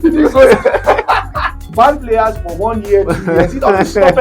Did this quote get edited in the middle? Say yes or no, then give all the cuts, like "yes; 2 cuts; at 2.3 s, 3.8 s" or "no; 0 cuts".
yes; 1 cut; at 1.6 s